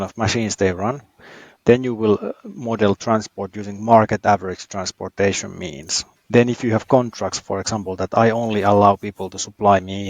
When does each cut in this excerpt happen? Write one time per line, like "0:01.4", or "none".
0:06.1